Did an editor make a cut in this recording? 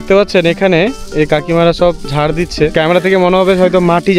yes; 1 cut; at 2.7 s

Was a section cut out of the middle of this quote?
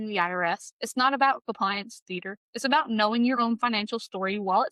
no; 0 cuts

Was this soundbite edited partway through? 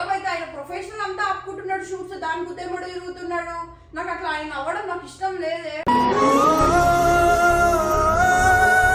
no; 0 cuts

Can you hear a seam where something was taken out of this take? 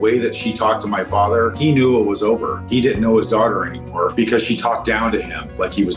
no; 0 cuts

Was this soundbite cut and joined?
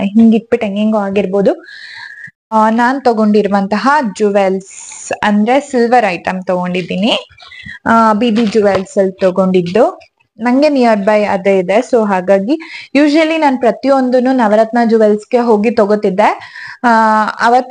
yes; 1 cut; at 2.5 s

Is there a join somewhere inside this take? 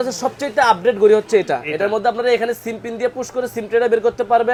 no; 0 cuts

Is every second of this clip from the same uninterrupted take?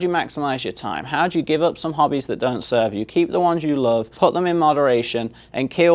no; 1 cut; at 4.1 s

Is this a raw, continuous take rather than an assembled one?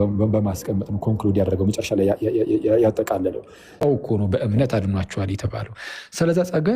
no; 1 cut; at 3.8 s

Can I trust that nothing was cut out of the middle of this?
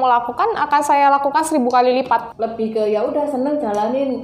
no; 1 cut; at 2.3 s

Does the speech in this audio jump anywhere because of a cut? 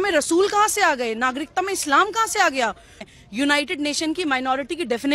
yes; 1 cut; at 3.1 s

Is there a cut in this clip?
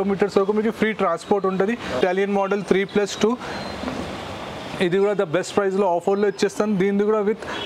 yes; 1 cut; at 2.0 s

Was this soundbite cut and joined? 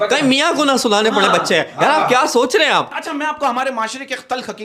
no; 0 cuts

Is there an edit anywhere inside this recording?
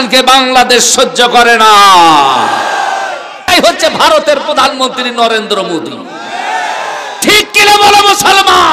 yes; 1 cut; at 3.5 s

